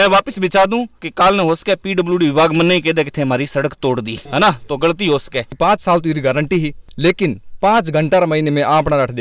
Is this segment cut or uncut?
cut